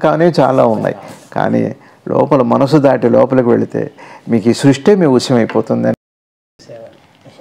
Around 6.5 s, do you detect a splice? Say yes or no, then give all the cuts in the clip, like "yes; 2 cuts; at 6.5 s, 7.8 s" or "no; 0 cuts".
yes; 1 cut; at 6.5 s